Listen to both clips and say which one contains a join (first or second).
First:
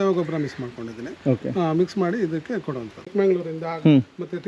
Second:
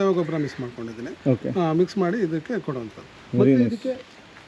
first